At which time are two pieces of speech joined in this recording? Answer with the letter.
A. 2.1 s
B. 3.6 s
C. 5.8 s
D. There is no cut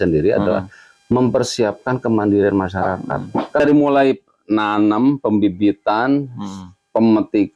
B